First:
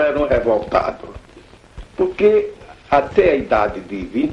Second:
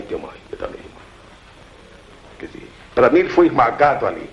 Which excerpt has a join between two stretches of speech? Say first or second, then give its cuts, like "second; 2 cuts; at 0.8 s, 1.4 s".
second; 1 cut; at 0.9 s